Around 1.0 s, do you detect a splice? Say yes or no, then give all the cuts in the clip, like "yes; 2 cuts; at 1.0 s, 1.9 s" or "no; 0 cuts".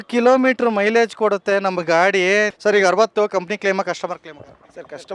no; 1 cut; at 2.5 s